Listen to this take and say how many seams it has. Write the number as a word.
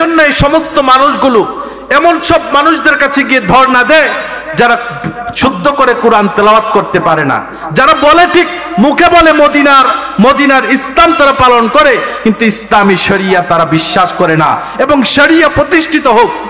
zero